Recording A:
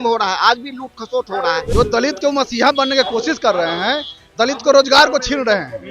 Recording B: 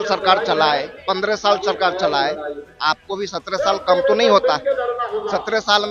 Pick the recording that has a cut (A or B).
A